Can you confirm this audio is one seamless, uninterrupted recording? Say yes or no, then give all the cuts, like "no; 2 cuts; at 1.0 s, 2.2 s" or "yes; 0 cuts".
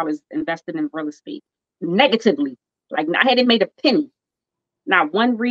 yes; 0 cuts